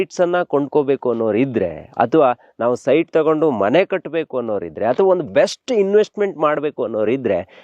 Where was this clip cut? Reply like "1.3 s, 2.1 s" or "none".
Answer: none

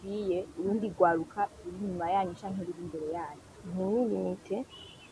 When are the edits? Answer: 3.5 s

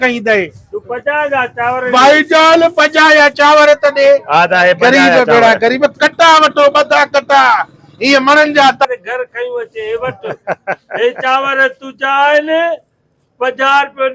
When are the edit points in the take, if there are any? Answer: 8.9 s

